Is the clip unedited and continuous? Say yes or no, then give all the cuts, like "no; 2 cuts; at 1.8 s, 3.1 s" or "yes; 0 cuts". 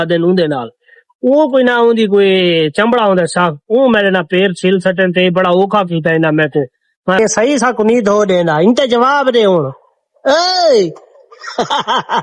no; 1 cut; at 7.2 s